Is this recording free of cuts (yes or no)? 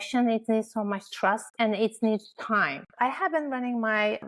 no